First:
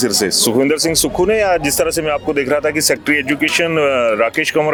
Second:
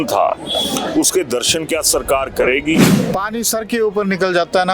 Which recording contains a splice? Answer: second; 1 cut; at 2.9 s

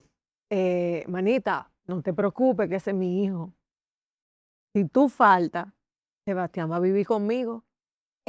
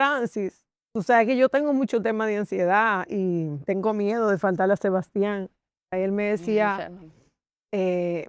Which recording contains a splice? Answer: second; 2 cuts; at 3.6 s, 5.9 s

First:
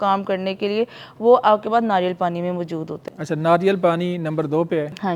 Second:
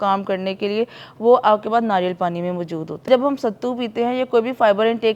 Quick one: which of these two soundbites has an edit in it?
second; 1 cut; at 3.0 s

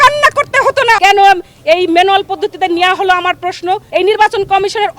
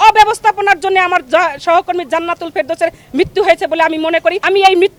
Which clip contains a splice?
first; 2 cuts; at 1.0 s, 3.8 s

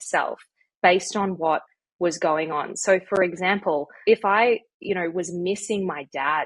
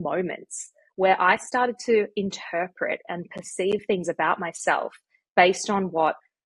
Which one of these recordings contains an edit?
first; 1 cut; at 3.9 s

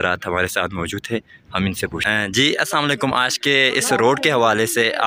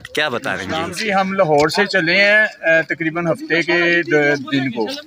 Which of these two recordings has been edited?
second; 1 cut; at 0.9 s

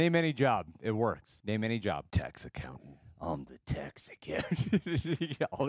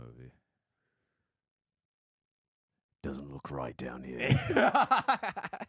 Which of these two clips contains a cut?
first; 2 cuts; at 1.3 s, 2.1 s

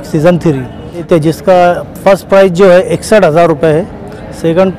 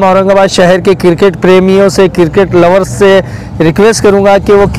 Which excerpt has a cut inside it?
first; 1 cut; at 1.1 s

